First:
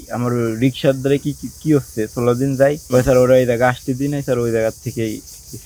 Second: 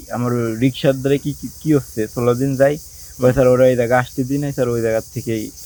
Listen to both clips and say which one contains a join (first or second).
first